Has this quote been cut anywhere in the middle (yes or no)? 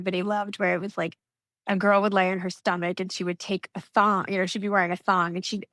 no